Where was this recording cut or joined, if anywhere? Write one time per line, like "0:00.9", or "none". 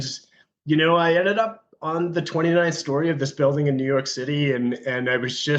none